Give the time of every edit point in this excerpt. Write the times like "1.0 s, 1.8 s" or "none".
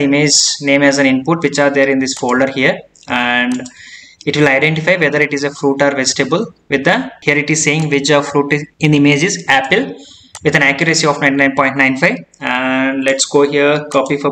7.1 s, 8.7 s